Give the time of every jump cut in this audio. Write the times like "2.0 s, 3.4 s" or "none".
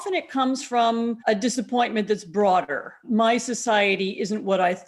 1.2 s, 3.0 s

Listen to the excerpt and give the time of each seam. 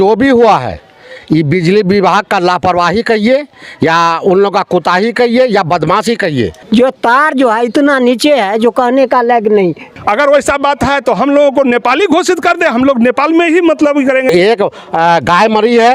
6.6 s, 9.8 s, 14.3 s

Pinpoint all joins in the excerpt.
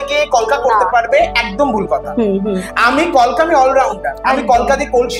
none

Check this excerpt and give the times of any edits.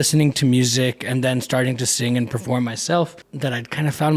3.2 s

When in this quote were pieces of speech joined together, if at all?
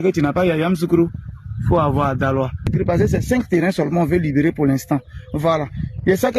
2.7 s

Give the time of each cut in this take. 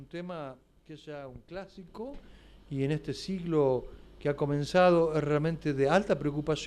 5.0 s

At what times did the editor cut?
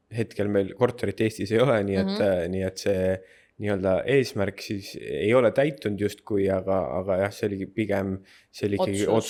none

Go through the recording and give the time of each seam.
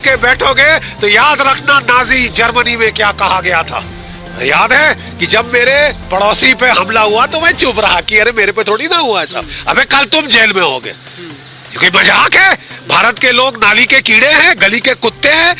none

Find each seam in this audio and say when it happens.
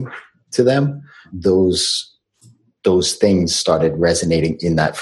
1.3 s

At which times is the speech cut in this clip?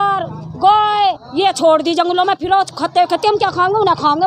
none

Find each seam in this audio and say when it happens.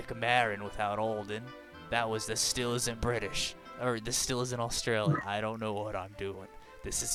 none

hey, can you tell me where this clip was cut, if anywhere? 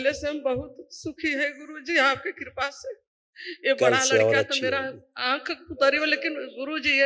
none

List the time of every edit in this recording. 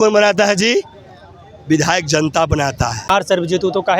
3.1 s

